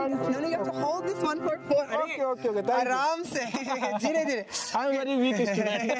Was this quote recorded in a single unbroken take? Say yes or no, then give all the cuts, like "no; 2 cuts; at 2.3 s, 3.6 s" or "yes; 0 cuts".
yes; 0 cuts